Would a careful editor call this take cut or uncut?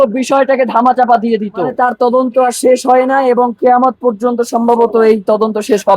cut